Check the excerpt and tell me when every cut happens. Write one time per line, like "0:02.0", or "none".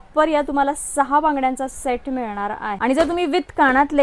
0:02.8